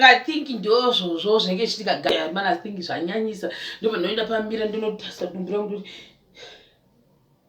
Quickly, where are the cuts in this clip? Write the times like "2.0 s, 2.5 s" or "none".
2.1 s

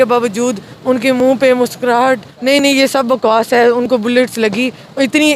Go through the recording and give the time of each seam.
2.2 s

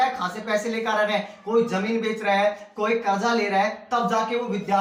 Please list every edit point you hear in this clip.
none

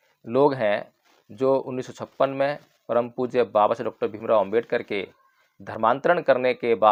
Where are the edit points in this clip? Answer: none

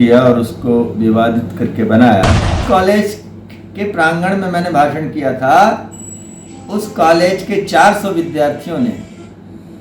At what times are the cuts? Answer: 2.6 s

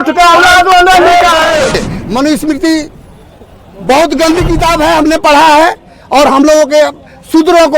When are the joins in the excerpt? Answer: 1.8 s

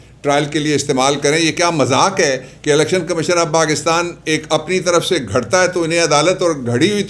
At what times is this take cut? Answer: none

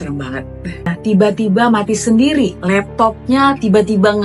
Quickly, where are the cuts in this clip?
0.9 s

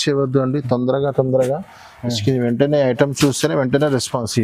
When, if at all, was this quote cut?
none

